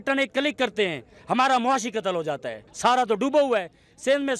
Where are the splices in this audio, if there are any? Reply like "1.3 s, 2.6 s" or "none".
2.7 s